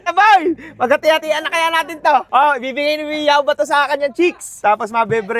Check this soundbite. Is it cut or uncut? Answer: cut